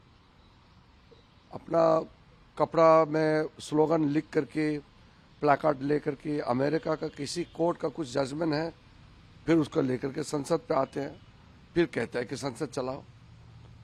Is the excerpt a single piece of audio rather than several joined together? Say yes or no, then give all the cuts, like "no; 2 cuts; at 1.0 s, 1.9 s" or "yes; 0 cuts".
yes; 0 cuts